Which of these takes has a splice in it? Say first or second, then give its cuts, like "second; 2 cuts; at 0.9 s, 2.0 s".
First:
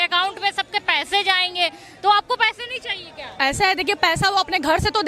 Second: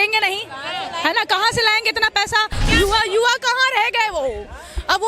second; 1 cut; at 2.6 s